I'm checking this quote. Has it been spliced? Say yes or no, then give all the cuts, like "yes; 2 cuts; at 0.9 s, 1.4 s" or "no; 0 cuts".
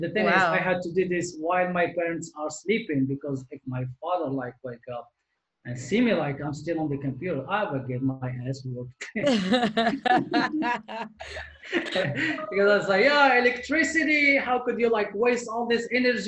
no; 0 cuts